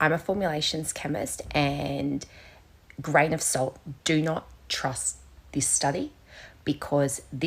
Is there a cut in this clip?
no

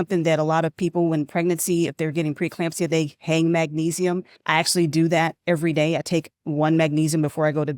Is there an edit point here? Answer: yes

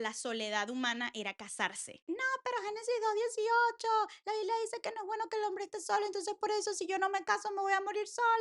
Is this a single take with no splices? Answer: no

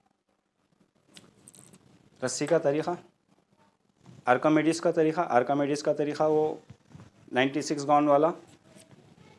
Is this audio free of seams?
yes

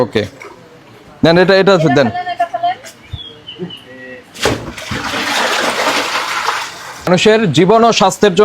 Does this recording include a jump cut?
yes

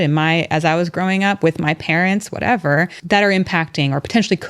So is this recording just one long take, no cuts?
no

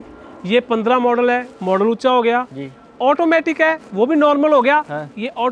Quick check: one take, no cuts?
yes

